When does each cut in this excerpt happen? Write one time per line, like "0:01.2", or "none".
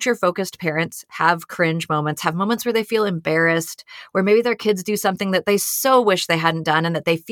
none